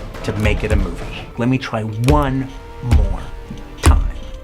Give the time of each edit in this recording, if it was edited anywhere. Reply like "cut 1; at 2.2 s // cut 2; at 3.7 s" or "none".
cut 1; at 1.2 s